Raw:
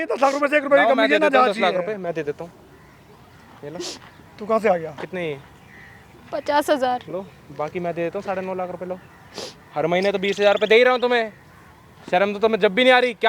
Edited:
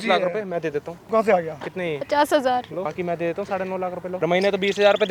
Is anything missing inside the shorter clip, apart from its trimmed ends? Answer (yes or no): yes